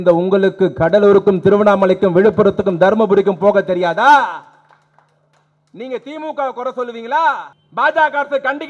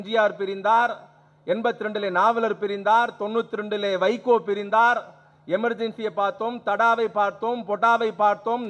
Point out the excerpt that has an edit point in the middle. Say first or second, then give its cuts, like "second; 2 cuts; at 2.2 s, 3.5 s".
first; 1 cut; at 7.5 s